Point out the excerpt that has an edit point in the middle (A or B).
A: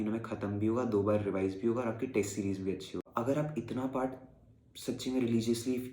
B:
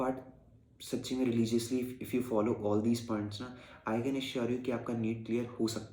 A